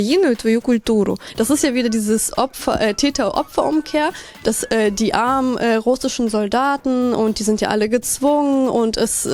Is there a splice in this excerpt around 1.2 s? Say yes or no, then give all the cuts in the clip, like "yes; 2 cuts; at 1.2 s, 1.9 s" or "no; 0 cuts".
yes; 1 cut; at 1.2 s